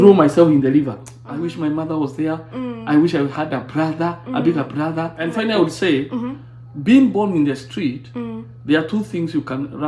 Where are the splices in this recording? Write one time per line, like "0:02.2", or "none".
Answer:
0:01.2
0:05.2